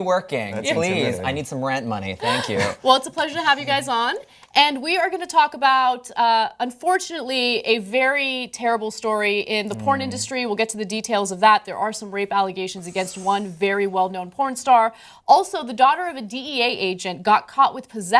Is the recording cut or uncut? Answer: cut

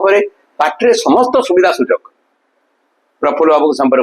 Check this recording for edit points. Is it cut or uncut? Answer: uncut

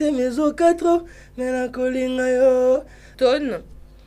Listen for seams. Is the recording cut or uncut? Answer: cut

